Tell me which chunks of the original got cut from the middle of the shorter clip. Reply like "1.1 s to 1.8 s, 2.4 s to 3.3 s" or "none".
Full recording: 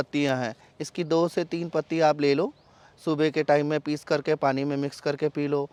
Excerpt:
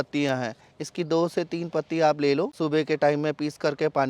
2.5 s to 3.0 s